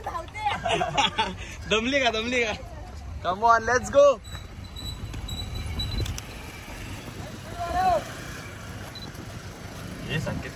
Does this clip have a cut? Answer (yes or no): no